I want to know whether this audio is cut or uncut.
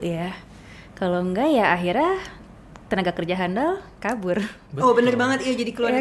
uncut